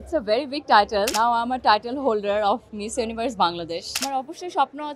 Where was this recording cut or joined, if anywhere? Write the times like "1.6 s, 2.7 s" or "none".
1.1 s, 4.0 s